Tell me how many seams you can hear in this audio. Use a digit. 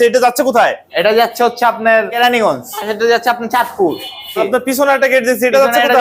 2